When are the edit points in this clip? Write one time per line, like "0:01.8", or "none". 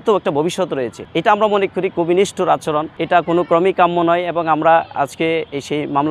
none

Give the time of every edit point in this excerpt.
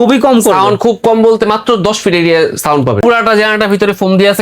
0:03.0

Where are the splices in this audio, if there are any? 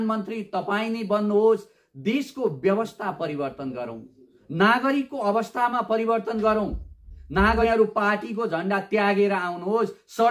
0:07.6

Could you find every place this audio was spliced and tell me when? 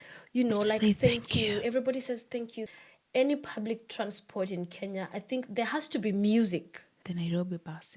0:02.6
0:07.0

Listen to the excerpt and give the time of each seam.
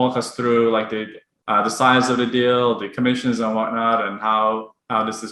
none

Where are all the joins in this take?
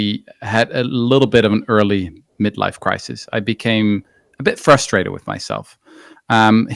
none

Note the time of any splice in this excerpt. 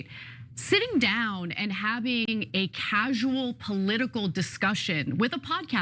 0:02.3

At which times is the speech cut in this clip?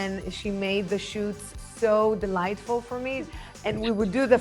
0:03.2

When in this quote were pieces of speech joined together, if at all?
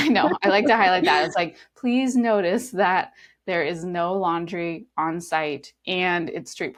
none

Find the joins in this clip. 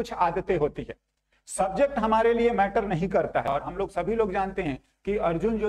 0:03.5

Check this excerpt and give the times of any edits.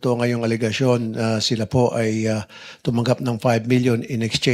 none

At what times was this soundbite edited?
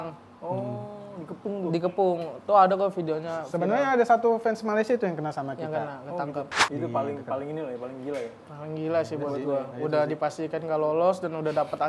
0:06.6

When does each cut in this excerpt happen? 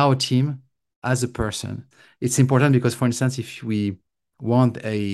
0:01.8

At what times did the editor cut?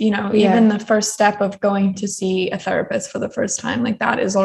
none

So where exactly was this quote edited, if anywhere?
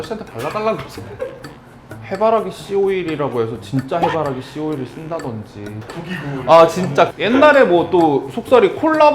0:01.9
0:05.9
0:07.2

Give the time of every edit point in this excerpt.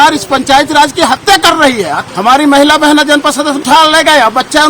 0:02.0
0:03.6

